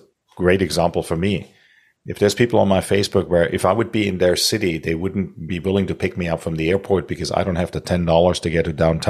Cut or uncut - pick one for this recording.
uncut